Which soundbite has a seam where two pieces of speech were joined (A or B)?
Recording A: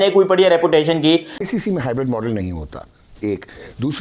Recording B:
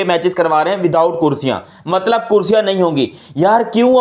A